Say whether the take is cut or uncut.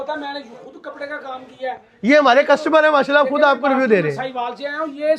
uncut